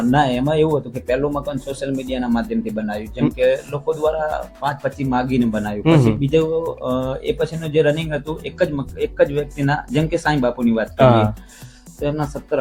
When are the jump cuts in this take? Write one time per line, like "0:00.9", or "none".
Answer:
none